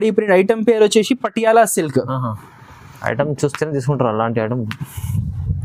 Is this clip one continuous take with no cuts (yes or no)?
yes